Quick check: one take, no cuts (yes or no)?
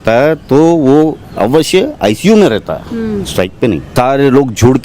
no